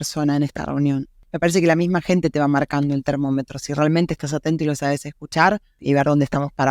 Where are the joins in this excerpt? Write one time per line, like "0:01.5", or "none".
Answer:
0:01.2
0:05.8

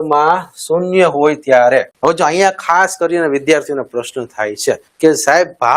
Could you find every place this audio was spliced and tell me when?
0:01.9
0:04.9

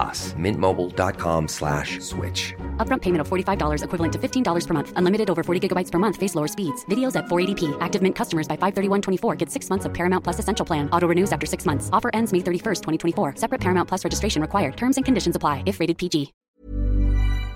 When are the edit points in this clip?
0:16.4

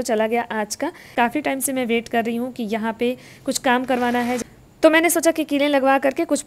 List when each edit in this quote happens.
0:01.1
0:04.4

